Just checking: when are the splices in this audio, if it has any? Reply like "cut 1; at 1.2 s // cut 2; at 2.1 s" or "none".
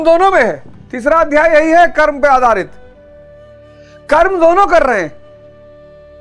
cut 1; at 2.7 s // cut 2; at 4.1 s